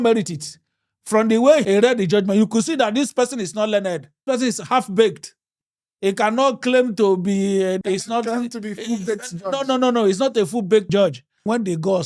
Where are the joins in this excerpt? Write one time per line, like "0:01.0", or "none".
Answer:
0:04.2
0:07.8
0:10.9